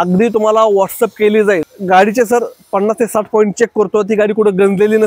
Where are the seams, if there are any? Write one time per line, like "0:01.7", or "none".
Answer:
0:01.7